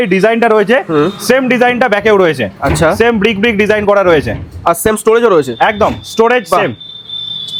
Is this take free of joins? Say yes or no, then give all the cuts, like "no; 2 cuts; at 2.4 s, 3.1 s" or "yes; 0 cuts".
yes; 0 cuts